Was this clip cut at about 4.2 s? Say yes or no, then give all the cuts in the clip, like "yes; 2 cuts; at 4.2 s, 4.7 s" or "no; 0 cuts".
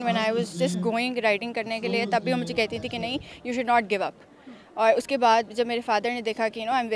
no; 0 cuts